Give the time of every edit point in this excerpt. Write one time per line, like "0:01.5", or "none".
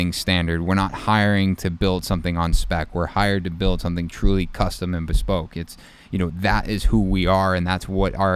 none

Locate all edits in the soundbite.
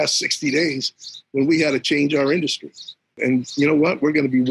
0:03.2

